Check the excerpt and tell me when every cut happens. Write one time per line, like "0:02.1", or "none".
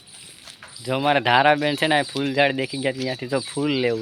none